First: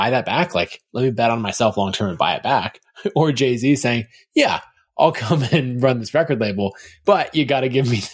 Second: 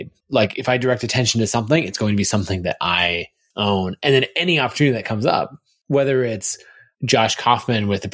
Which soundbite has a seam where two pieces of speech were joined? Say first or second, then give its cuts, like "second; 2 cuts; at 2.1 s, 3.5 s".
first; 1 cut; at 6.9 s